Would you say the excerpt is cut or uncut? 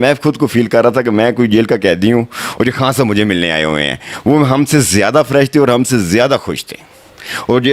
uncut